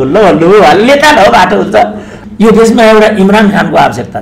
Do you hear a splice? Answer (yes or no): yes